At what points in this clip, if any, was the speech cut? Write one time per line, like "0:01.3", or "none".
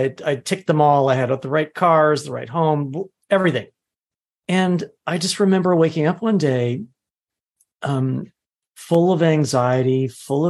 none

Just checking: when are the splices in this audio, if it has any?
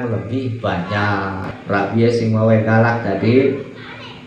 0:01.5

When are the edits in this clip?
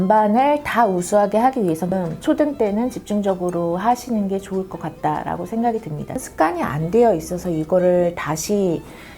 0:02.0
0:06.2

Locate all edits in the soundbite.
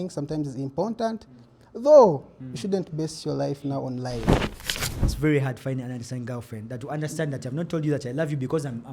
0:04.6

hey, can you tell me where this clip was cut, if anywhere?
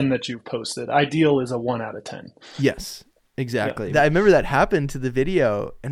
0:03.8

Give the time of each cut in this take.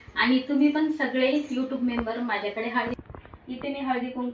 0:03.0

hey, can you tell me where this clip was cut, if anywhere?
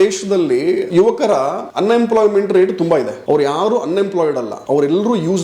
0:00.9
0:01.6
0:03.1
0:04.5

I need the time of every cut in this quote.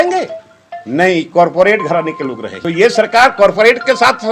0:02.5

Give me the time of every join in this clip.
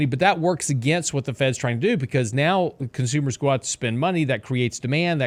none

